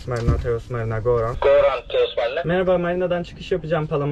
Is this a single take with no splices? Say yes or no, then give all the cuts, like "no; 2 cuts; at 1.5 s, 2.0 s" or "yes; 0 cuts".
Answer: yes; 0 cuts